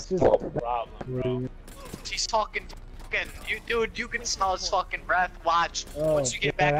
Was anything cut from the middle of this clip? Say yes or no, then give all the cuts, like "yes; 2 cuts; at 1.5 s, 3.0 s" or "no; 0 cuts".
no; 0 cuts